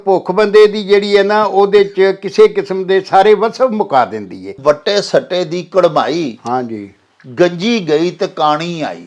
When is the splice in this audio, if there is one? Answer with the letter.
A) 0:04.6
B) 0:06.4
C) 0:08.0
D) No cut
A